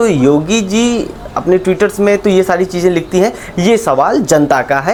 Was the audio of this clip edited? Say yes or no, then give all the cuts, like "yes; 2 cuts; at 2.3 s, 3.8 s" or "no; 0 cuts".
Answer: no; 0 cuts